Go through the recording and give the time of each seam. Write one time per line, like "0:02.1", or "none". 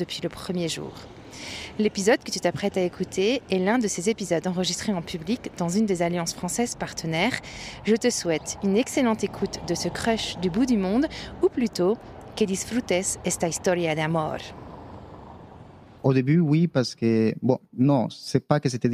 0:15.9